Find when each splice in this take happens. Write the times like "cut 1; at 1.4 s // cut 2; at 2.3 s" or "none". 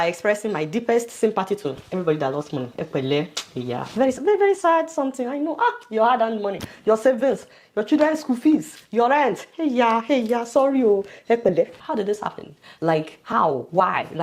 none